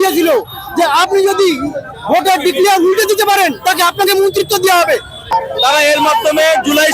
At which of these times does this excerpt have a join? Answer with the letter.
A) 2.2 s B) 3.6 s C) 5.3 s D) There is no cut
C